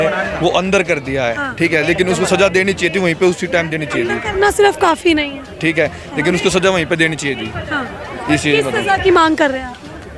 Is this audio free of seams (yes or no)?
yes